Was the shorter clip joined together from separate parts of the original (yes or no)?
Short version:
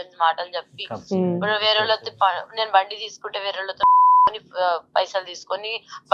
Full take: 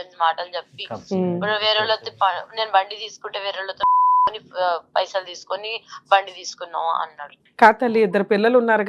no